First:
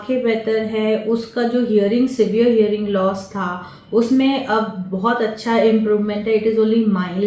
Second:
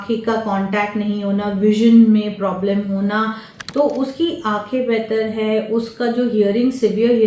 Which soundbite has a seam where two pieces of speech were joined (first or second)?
second